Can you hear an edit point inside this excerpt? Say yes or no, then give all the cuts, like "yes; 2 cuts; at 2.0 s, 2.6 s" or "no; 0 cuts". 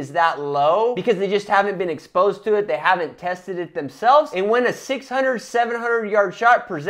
yes; 2 cuts; at 1.0 s, 4.3 s